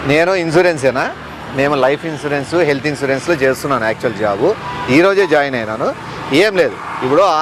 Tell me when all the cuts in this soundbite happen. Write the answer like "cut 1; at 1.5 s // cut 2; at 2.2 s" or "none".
none